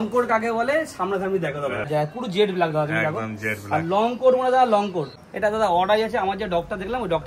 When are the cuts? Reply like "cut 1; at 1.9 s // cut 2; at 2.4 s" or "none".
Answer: cut 1; at 1.9 s // cut 2; at 5.2 s